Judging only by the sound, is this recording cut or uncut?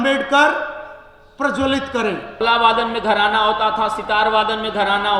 cut